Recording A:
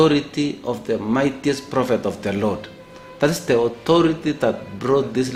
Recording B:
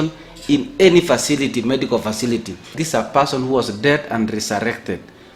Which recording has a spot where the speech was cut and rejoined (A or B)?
B